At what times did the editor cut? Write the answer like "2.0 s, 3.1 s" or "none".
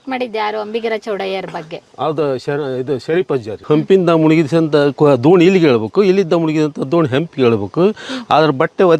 3.6 s